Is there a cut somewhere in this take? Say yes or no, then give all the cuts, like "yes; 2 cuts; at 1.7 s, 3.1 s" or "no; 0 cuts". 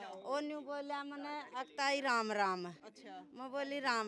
no; 0 cuts